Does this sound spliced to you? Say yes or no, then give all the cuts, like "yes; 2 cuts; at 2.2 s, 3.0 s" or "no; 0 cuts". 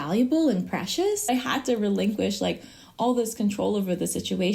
yes; 1 cut; at 1.3 s